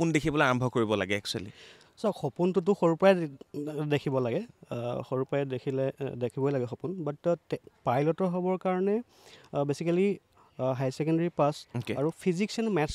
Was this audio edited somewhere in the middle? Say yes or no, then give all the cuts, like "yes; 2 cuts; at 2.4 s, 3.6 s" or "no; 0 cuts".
no; 0 cuts